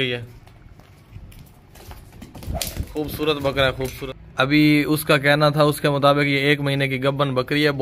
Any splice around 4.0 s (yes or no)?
yes